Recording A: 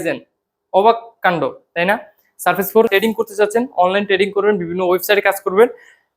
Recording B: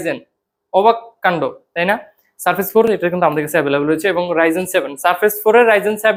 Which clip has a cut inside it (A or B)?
A